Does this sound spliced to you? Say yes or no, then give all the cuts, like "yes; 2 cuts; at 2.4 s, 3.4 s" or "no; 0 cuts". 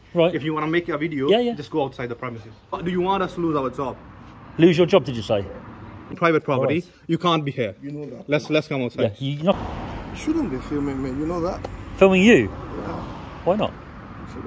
yes; 3 cuts; at 2.8 s, 6.1 s, 9.6 s